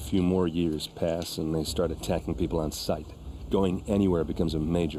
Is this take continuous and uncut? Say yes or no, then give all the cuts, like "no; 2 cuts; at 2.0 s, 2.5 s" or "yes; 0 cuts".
yes; 0 cuts